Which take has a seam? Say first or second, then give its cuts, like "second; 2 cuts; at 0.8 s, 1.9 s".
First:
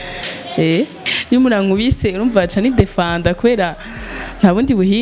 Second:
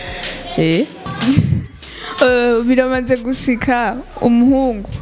first; 1 cut; at 1.0 s